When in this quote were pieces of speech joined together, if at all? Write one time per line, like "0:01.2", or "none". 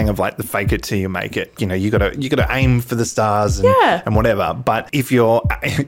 0:01.6
0:04.9